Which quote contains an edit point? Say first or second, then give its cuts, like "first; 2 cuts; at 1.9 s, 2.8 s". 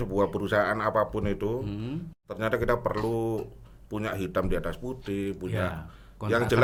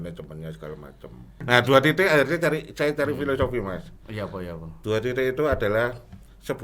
second; 1 cut; at 1.4 s